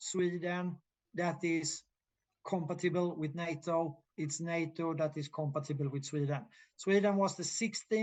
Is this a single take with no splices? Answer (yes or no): yes